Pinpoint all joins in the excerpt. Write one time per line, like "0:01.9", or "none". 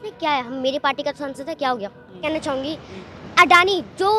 0:02.2